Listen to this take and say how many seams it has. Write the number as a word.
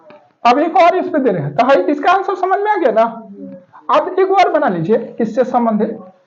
zero